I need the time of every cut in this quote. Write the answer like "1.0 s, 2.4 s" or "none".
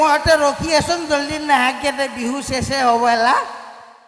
none